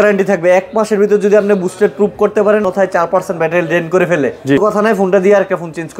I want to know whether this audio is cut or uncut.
cut